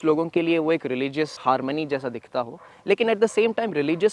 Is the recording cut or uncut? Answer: cut